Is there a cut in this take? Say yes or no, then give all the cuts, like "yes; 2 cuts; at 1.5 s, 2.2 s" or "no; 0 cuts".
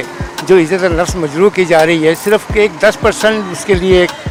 no; 0 cuts